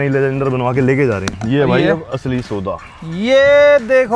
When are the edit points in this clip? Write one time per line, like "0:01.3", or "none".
0:01.3